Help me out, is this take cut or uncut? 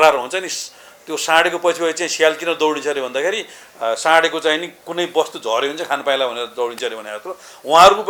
uncut